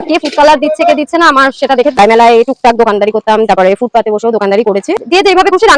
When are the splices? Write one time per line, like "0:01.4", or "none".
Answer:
0:02.0
0:05.0